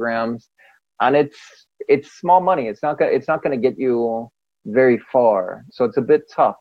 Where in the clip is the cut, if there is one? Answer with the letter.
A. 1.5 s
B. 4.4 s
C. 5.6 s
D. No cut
C